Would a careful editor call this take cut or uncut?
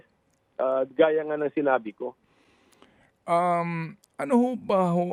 uncut